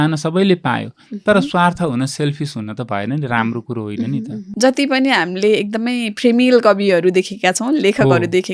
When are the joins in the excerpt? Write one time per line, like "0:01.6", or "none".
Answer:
0:04.4